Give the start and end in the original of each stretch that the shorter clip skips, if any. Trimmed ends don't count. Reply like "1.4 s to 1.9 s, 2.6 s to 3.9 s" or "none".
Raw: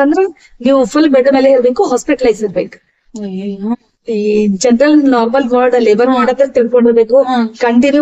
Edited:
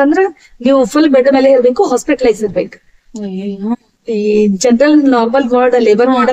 none